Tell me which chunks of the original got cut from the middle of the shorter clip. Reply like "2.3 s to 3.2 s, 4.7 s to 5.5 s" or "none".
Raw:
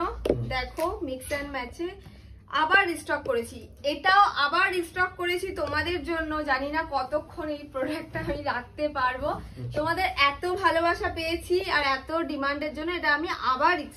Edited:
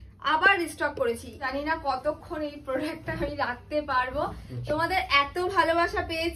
3.7 s to 6.5 s